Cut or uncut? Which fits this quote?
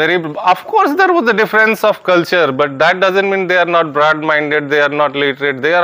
uncut